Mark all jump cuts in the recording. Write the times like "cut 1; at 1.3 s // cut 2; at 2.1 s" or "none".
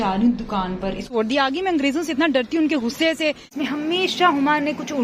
cut 1; at 1.1 s // cut 2; at 3.5 s